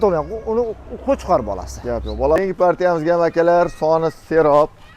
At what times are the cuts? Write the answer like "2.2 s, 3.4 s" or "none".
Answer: 2.4 s